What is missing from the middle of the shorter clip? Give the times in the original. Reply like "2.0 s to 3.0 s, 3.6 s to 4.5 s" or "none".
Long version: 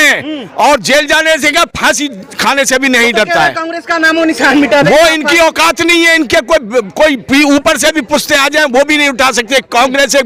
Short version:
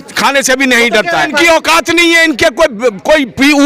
3.5 s to 5.2 s